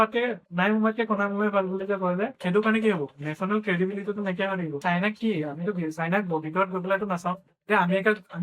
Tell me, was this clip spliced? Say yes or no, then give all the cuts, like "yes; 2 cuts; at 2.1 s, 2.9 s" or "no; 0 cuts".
yes; 2 cuts; at 2.4 s, 4.8 s